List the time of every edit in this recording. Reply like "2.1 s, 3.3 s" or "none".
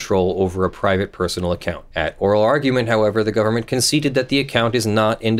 none